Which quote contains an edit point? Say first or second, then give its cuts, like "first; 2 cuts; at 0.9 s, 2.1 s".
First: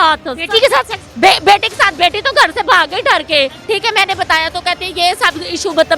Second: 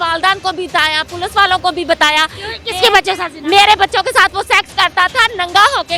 first; 2 cuts; at 1.0 s, 3.6 s